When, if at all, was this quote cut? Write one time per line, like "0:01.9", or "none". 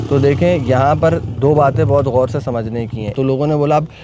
0:03.1